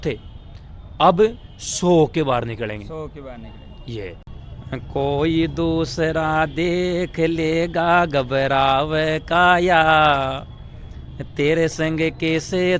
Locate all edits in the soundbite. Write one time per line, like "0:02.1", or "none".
0:04.3